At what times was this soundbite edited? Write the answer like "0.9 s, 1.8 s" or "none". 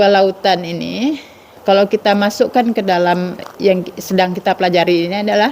1.6 s, 3.4 s